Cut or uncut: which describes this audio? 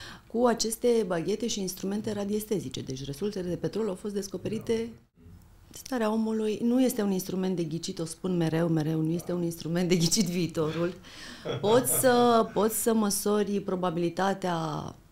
cut